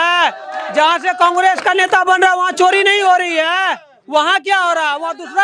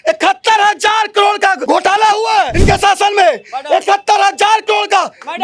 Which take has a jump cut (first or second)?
second